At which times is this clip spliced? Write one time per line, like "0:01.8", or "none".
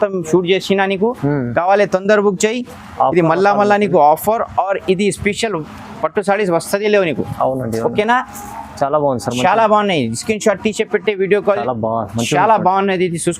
0:11.6